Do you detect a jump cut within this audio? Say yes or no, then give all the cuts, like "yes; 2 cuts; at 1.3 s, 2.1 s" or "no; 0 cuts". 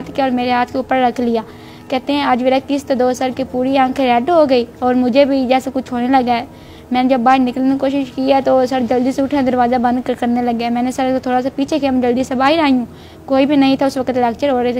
no; 0 cuts